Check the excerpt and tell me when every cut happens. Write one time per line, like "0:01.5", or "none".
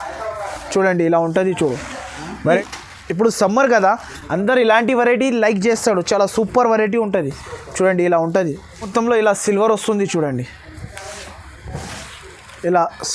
0:02.4
0:08.9